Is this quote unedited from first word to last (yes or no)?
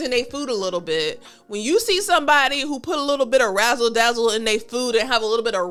yes